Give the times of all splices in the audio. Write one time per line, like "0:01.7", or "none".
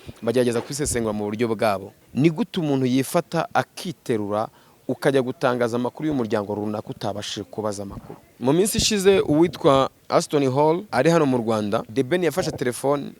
0:02.0
0:08.2
0:10.0
0:10.9
0:11.9